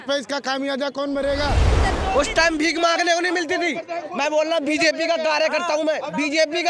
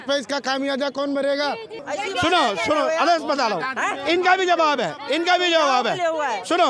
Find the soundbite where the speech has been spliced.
first; 1 cut; at 1.8 s

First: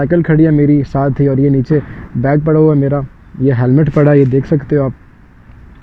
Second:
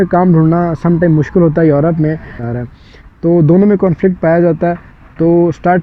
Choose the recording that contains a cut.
second; 1 cut; at 2.3 s

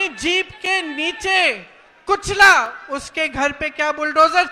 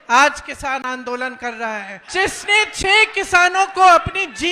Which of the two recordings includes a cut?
second; 1 cut; at 2.0 s

